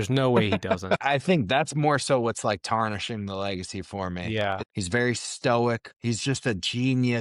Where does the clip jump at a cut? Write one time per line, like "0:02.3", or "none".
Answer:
0:00.9
0:04.3
0:05.9